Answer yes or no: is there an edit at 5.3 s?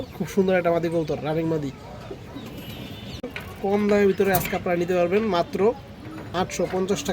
no